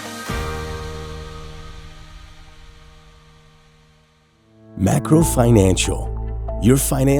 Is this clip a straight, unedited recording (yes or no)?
no